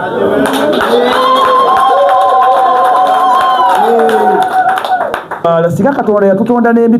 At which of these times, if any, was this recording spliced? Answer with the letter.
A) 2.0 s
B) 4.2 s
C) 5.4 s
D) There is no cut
C